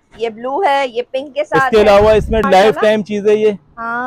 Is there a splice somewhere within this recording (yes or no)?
yes